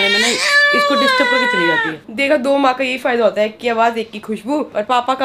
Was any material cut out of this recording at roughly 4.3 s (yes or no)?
no